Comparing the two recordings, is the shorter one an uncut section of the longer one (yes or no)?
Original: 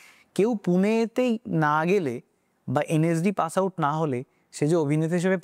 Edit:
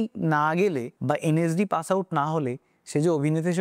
no